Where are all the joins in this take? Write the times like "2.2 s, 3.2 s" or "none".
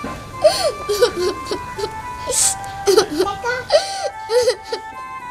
none